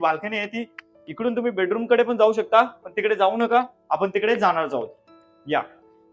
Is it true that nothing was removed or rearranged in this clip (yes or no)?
yes